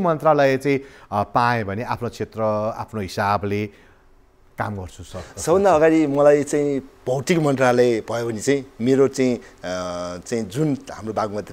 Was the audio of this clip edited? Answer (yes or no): no